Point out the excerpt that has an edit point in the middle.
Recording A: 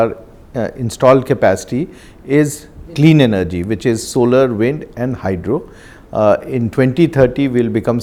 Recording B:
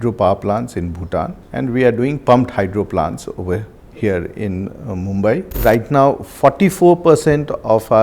B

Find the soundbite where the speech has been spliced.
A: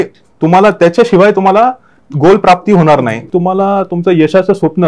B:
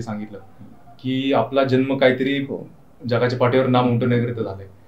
A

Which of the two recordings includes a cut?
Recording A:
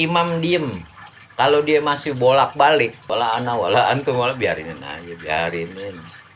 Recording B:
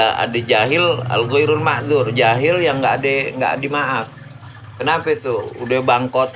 A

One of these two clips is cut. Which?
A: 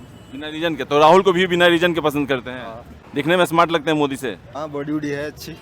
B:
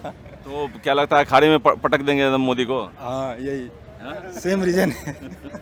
A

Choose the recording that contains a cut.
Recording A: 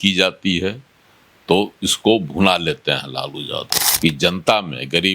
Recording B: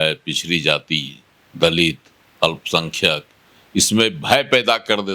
A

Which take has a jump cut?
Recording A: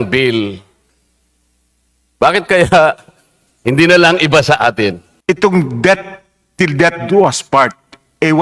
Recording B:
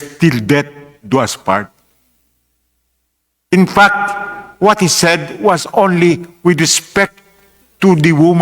A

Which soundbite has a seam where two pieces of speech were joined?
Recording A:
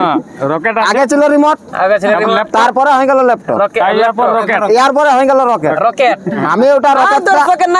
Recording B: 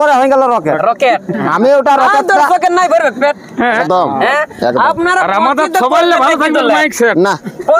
B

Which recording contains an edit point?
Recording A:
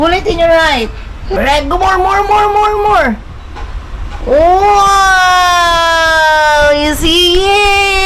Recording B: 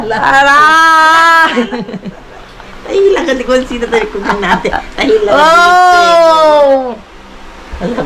A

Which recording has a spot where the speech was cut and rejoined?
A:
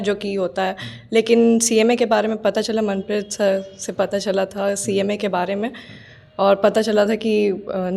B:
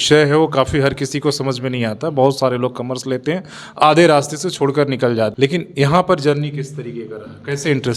B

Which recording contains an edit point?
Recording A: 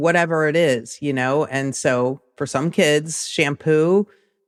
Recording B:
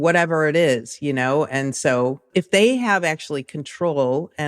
B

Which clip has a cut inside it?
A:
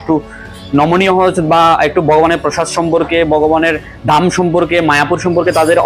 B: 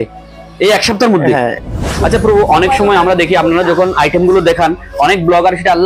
B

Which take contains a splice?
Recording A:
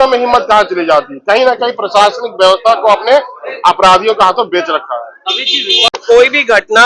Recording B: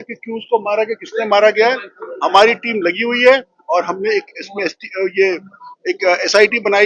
A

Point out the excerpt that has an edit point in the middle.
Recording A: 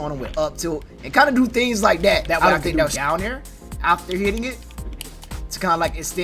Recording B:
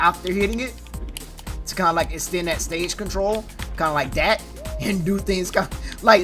A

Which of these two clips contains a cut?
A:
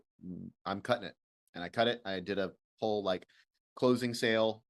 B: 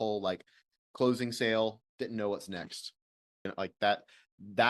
B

